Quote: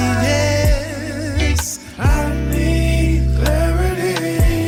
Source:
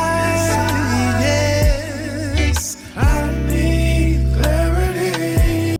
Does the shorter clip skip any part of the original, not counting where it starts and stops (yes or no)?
no